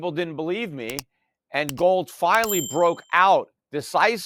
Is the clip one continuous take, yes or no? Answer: yes